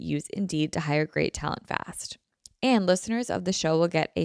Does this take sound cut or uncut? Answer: uncut